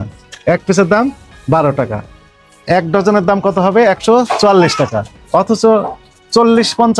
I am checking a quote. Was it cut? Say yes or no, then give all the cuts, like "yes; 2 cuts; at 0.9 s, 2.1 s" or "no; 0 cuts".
no; 0 cuts